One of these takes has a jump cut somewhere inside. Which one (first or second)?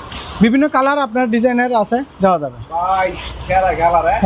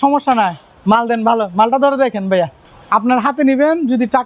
second